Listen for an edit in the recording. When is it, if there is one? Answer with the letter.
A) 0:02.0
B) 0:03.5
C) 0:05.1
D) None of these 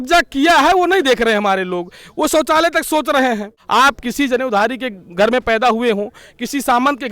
B